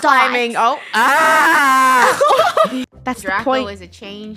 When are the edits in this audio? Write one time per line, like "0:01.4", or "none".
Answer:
0:02.8